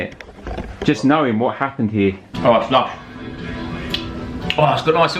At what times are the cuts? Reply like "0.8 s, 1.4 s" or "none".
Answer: 2.3 s

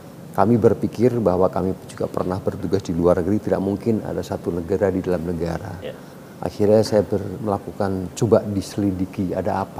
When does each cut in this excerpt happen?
none

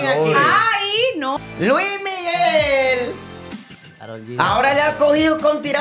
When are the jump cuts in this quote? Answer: 1.4 s

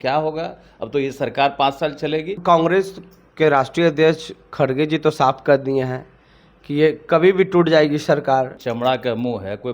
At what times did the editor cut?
2.4 s, 8.6 s

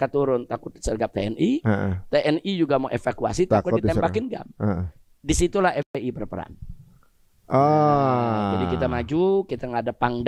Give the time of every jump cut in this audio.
none

